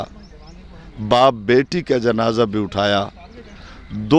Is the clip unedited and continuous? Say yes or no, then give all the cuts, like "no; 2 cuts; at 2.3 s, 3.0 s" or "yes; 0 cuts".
yes; 0 cuts